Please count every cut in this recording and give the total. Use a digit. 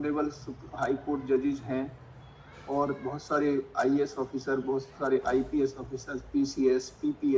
0